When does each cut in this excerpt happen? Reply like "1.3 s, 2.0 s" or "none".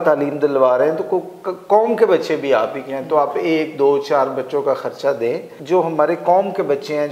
5.5 s